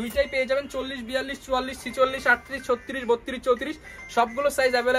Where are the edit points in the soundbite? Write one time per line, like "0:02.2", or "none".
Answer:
none